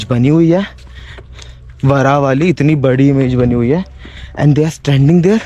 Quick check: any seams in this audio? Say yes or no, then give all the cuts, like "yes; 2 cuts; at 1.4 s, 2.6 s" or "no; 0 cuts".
no; 0 cuts